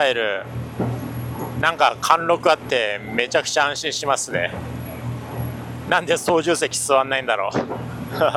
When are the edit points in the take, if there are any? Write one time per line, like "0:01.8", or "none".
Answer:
none